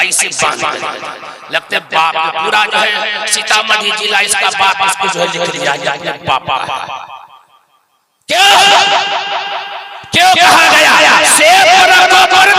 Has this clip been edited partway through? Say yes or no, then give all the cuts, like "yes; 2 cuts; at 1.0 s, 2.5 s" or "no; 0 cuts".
no; 0 cuts